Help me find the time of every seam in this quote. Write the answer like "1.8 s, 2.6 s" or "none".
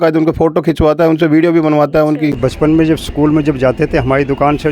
2.4 s